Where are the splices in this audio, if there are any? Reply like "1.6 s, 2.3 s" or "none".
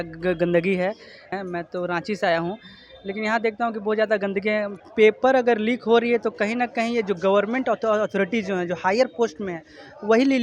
1.4 s, 4.8 s